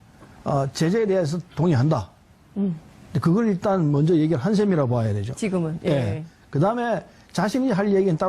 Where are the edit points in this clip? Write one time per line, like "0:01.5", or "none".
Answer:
0:04.2